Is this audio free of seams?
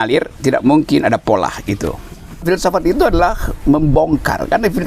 no; 1 cut; at 2.4 s

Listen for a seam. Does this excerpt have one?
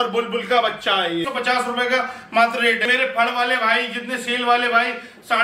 yes; 2 cuts; at 1.3 s, 2.9 s

